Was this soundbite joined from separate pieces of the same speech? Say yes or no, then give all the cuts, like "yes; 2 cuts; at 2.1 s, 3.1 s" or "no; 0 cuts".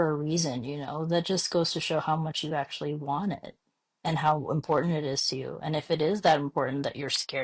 no; 0 cuts